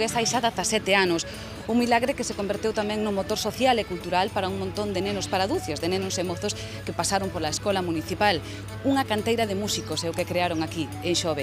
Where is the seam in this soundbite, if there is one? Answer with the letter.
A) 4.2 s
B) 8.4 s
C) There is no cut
B